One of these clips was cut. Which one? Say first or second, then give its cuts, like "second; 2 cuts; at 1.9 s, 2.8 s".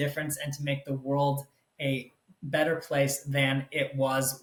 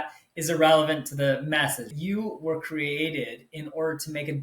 second; 1 cut; at 1.9 s